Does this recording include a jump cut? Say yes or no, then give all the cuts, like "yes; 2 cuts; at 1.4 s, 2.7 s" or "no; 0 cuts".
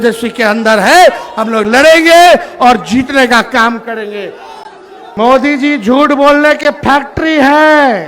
yes; 1 cut; at 4.9 s